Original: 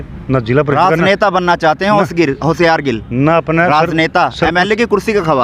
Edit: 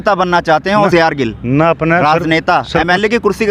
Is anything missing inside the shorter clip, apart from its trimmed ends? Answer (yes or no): yes